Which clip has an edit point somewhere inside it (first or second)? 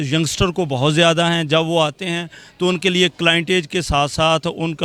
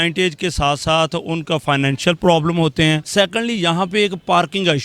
second